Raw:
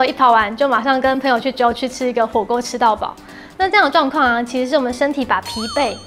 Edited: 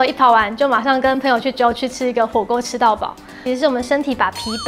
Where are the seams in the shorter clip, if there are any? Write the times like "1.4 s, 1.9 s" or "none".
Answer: 3.4 s